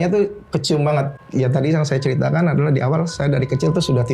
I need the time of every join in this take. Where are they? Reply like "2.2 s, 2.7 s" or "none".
1.2 s

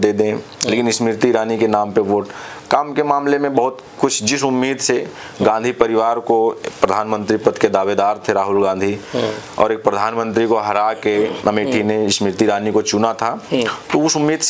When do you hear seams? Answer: none

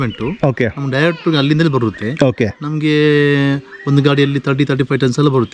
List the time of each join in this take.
none

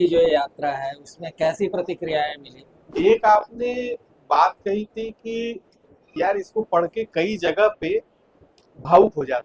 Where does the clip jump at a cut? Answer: 2.9 s

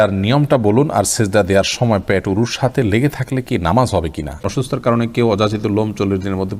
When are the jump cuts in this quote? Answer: 4.4 s

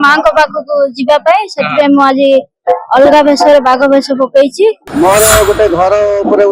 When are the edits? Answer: 4.8 s

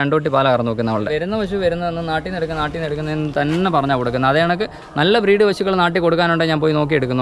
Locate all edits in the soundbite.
1.1 s

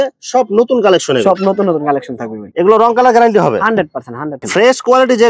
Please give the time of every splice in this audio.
none

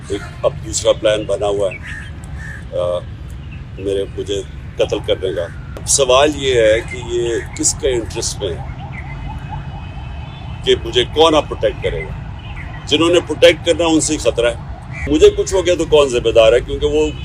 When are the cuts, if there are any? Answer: 5.9 s, 15.0 s

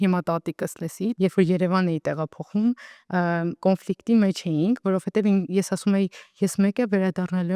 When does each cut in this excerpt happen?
1.1 s

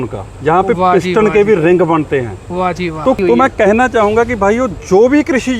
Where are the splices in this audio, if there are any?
3.2 s

